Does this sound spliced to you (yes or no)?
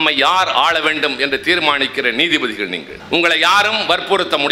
yes